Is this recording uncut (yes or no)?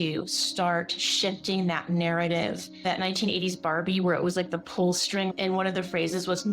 no